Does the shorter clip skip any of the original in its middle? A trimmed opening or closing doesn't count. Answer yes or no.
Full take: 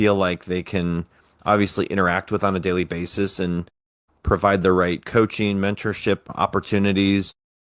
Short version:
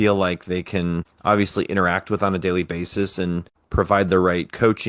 yes